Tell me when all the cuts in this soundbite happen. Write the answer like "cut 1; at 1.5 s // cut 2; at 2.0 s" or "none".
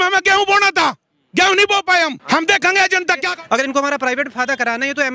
cut 1; at 2.2 s // cut 2; at 3.3 s